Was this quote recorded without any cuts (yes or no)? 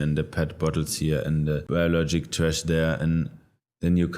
no